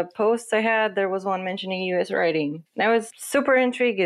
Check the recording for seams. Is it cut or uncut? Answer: cut